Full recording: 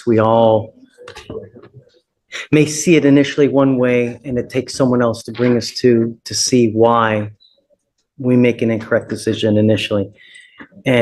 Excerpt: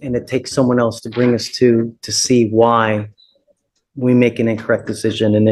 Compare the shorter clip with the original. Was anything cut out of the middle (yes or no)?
no